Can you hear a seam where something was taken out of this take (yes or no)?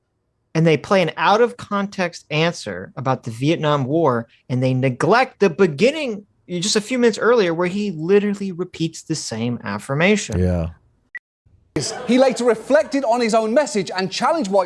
yes